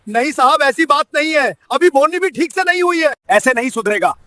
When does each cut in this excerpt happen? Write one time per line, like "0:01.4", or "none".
0:03.2